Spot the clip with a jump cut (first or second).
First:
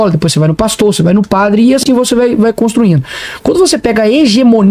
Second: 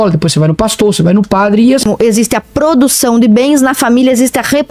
second